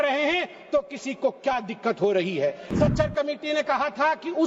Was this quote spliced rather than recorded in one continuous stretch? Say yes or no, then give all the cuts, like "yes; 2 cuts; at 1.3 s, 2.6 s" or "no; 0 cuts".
yes; 1 cut; at 2.6 s